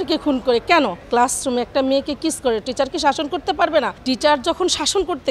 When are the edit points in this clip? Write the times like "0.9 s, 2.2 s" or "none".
1.1 s, 4.0 s

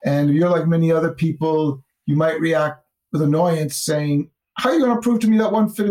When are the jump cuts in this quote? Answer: 1.9 s, 4.4 s

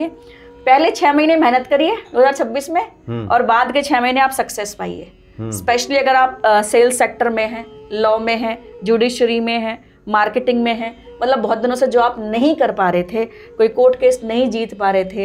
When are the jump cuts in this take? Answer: none

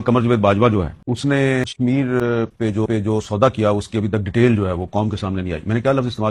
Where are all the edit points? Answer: 1.0 s, 1.6 s

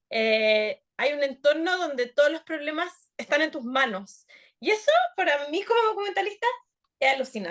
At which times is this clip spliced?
none

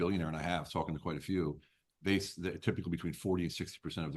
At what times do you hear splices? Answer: none

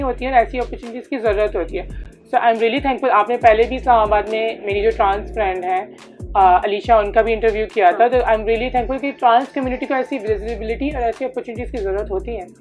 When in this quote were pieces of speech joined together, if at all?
none

